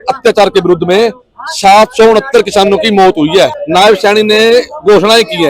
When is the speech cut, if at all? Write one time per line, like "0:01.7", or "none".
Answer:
0:03.6